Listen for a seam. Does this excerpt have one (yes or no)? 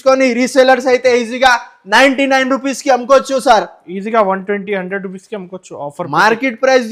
no